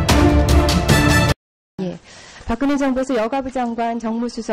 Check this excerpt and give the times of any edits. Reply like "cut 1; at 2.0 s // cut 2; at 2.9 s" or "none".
cut 1; at 1.7 s